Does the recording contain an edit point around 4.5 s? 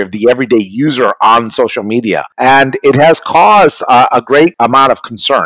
yes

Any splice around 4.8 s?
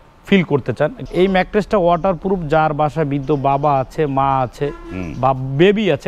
no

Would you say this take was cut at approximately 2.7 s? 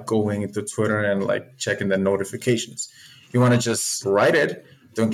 no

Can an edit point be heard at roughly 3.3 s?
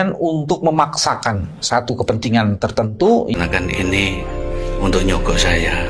yes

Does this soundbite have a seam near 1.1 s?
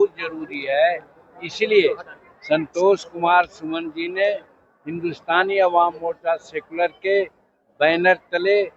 no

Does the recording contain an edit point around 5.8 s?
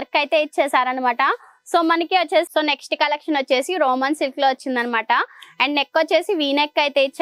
no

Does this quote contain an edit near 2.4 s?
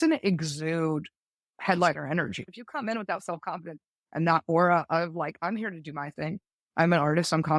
yes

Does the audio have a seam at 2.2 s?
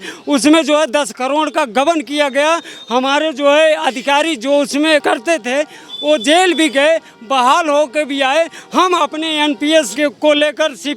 no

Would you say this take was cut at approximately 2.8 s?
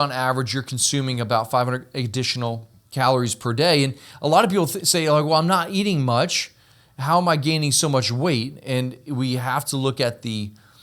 yes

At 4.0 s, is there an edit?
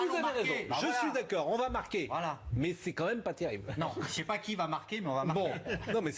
yes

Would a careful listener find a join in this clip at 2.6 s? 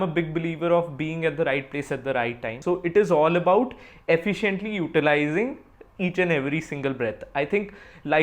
yes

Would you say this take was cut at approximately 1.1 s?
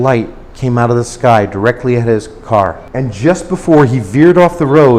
no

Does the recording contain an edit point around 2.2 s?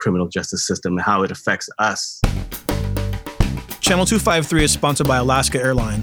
yes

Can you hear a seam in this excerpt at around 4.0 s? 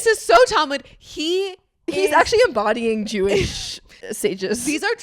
yes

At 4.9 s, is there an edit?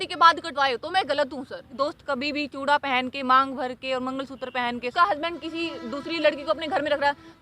yes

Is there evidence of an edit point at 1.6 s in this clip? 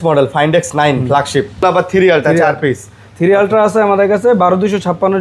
yes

